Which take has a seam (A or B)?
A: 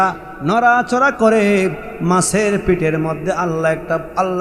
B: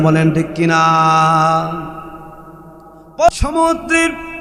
B